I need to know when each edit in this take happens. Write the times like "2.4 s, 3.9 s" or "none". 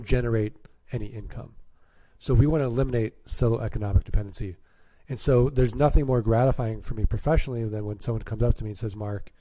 none